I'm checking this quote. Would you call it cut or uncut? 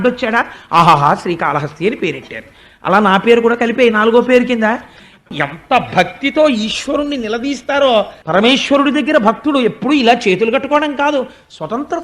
cut